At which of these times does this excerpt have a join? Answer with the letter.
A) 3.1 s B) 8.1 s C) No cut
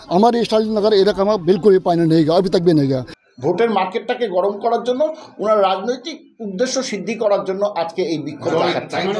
A